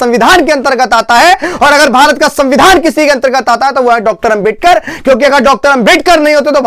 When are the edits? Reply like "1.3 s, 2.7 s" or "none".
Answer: none